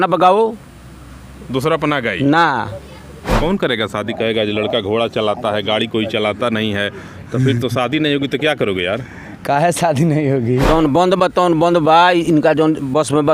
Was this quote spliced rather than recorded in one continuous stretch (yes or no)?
yes